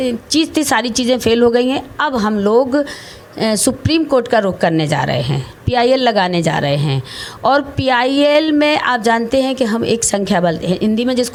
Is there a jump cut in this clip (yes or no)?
no